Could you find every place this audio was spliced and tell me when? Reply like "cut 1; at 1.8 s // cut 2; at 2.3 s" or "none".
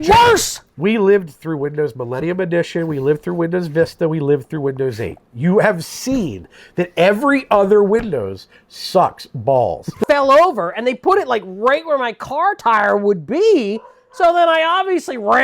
cut 1; at 9.9 s